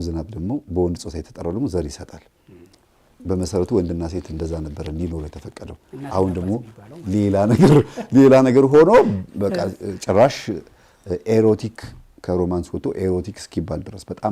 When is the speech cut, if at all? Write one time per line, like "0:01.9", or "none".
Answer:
none